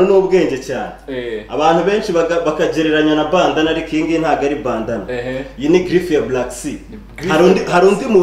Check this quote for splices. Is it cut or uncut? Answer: uncut